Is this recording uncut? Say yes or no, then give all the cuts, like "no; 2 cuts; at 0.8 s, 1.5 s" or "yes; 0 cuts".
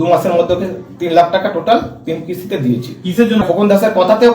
no; 1 cut; at 3.4 s